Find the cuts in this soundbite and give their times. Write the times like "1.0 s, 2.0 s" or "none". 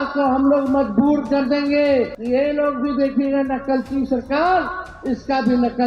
2.2 s